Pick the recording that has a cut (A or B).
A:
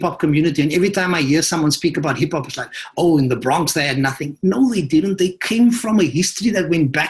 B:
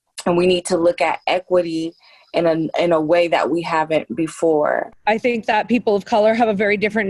B